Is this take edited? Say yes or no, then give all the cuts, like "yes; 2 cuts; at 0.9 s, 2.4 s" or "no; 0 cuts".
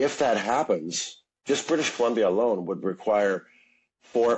yes; 1 cut; at 1.3 s